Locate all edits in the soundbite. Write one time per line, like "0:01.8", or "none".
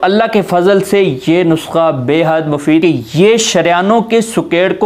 0:02.8